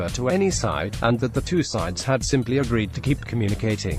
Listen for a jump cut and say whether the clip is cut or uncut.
uncut